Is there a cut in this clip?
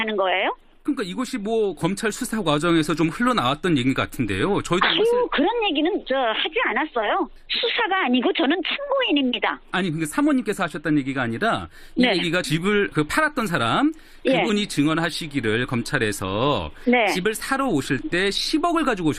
no; 0 cuts

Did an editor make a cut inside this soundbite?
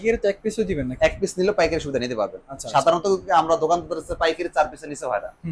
no; 0 cuts

